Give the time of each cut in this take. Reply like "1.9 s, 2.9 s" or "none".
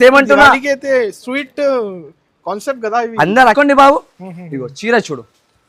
3.5 s